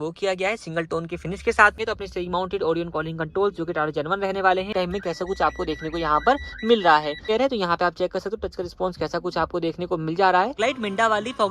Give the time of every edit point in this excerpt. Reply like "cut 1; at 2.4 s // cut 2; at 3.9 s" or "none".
cut 1; at 1.8 s // cut 2; at 4.7 s // cut 3; at 7.3 s // cut 4; at 10.6 s

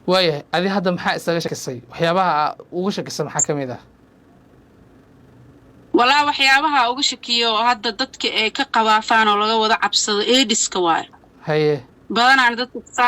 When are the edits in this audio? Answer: cut 1; at 1.5 s

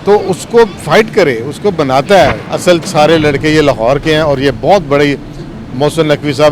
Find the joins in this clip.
cut 1; at 2.5 s

